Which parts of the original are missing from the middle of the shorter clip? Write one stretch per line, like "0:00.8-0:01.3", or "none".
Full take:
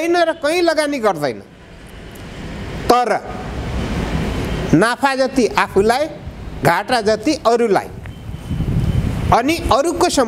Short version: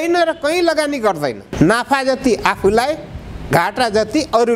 0:01.5-0:04.6